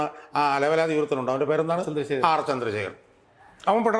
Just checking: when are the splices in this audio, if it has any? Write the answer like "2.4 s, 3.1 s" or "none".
none